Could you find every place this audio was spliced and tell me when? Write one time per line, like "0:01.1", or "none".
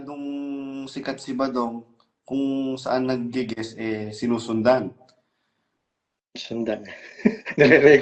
none

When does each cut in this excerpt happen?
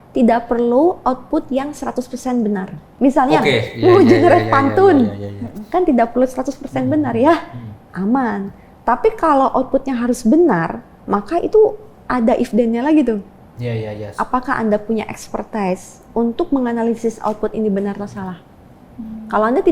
0:02.8

